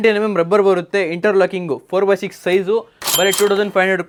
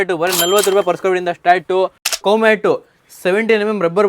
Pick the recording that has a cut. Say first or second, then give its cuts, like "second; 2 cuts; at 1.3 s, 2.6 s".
second; 1 cut; at 2.2 s